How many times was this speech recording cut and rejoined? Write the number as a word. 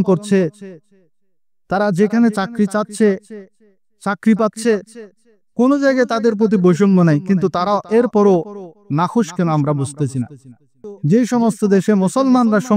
one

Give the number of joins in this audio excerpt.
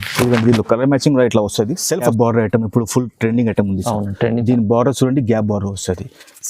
one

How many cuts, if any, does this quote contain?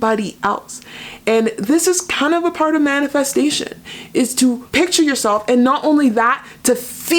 one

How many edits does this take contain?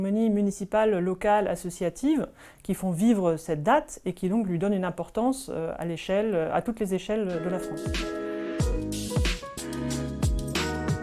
one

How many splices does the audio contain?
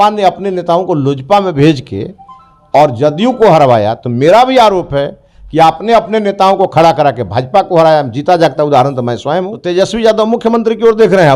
one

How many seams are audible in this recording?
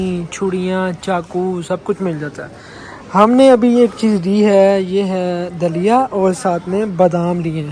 zero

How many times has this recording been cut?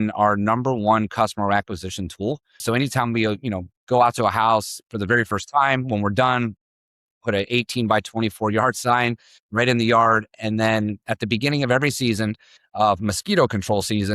one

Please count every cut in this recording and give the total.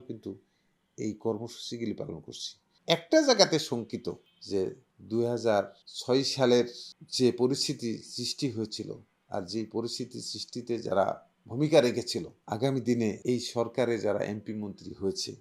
one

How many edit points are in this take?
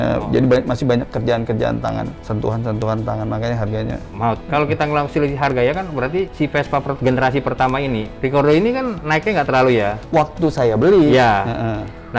zero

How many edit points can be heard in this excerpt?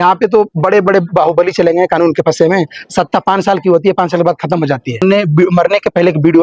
one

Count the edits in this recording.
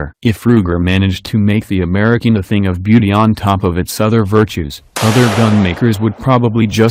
one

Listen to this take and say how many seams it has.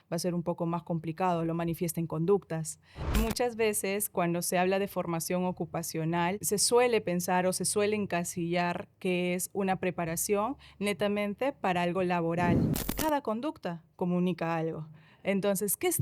three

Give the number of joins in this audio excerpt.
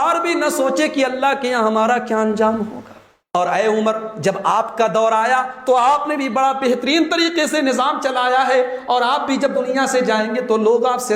one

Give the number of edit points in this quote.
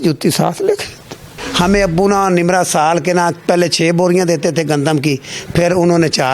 one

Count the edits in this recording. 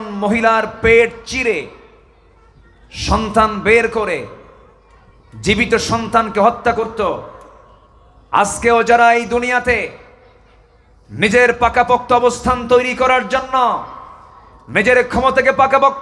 zero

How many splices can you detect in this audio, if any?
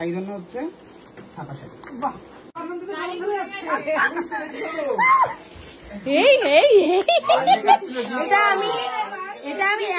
one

